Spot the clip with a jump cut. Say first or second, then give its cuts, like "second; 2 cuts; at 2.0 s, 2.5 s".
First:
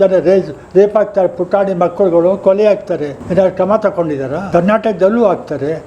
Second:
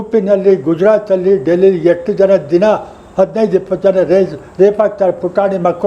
first; 2 cuts; at 3.2 s, 4.4 s